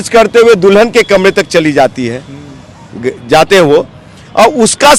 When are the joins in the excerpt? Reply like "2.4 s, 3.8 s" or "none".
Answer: none